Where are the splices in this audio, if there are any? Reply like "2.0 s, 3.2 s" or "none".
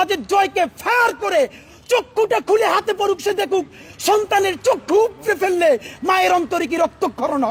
none